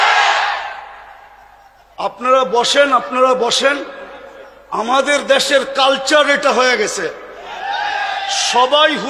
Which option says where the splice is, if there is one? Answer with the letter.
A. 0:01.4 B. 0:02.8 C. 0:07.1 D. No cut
D